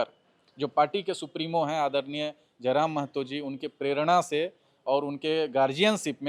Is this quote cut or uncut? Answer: uncut